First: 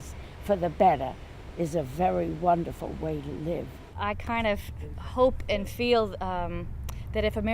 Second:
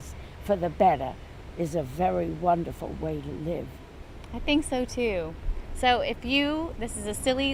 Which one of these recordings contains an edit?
first; 1 cut; at 3.9 s

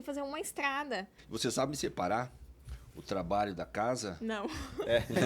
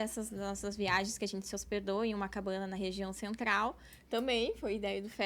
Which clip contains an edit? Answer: first; 1 cut; at 1.2 s

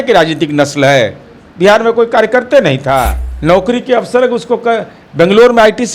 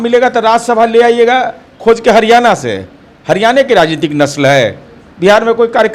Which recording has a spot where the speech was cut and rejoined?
first; 1 cut; at 3.2 s

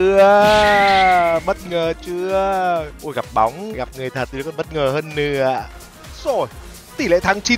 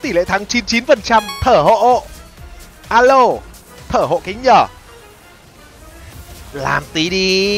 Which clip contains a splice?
first; 3 cuts; at 3.0 s, 3.7 s, 5.8 s

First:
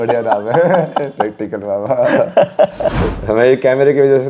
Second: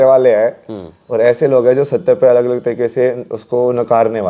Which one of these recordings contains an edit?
first; 1 cut; at 3.1 s

